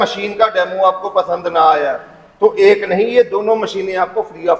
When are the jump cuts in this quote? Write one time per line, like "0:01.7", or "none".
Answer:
none